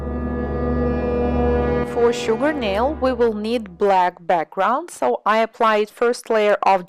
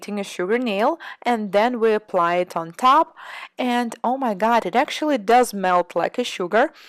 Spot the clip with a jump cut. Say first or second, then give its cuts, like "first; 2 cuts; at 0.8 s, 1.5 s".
first; 1 cut; at 4.2 s